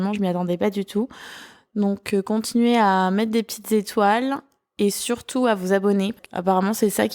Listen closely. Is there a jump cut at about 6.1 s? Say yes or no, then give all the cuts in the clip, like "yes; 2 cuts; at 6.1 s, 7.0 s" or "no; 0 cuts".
yes; 1 cut; at 6.1 s